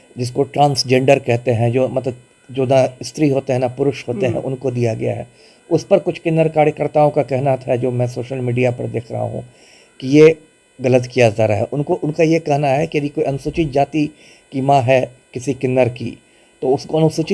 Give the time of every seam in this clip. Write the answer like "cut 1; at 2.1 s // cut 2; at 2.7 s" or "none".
none